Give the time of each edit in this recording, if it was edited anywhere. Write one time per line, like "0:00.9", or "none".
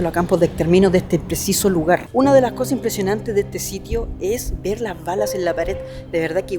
0:02.1

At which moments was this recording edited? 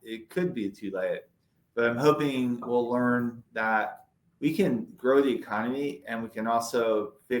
0:02.6
0:04.2

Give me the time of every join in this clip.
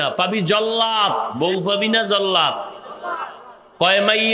0:01.3

